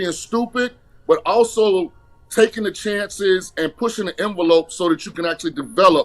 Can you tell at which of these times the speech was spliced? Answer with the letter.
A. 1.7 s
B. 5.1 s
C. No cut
B